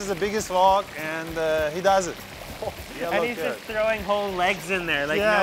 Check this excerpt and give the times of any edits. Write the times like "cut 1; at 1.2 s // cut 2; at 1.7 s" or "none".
none